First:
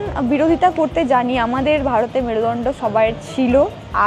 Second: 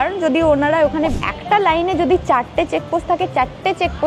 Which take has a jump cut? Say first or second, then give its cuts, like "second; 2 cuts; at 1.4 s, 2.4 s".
second; 1 cut; at 1.1 s